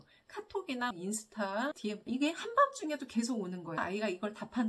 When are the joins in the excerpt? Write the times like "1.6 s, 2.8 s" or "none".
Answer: 2.1 s, 3.8 s